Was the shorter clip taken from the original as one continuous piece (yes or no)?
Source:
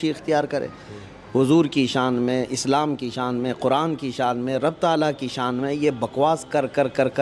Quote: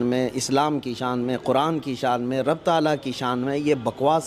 yes